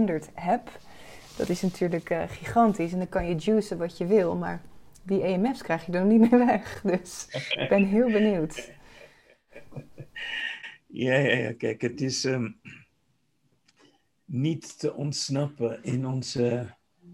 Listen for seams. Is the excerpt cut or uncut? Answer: uncut